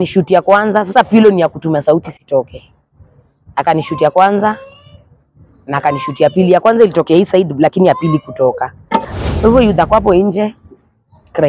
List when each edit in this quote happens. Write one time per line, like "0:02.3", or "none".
0:09.2